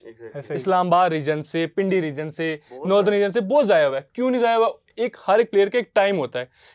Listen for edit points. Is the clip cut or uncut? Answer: uncut